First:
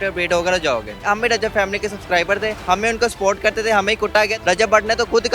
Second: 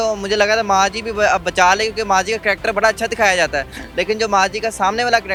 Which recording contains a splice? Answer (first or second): first